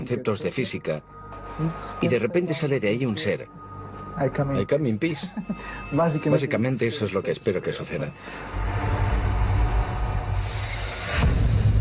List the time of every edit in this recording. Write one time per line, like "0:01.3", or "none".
0:08.1